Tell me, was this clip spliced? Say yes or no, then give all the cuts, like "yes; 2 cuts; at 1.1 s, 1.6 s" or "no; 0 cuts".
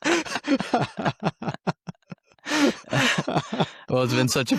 no; 0 cuts